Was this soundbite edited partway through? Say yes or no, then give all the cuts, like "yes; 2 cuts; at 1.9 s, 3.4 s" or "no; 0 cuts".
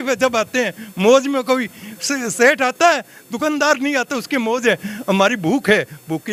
no; 0 cuts